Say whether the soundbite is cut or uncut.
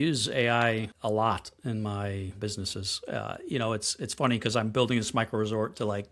cut